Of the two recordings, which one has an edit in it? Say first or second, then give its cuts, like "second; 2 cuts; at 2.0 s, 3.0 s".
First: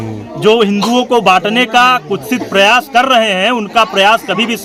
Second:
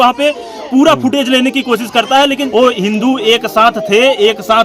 second; 1 cut; at 2.4 s